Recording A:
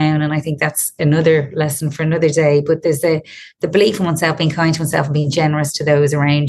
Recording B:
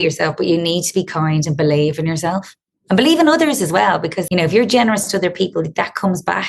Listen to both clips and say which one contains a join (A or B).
B